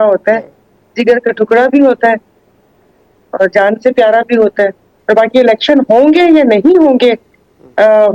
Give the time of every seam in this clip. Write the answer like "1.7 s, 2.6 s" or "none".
4.9 s